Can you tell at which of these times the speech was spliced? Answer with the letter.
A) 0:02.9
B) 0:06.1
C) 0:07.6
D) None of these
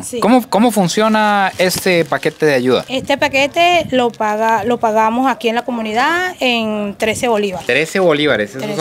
D